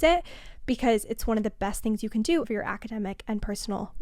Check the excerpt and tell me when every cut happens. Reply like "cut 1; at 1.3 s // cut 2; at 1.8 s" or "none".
cut 1; at 2.5 s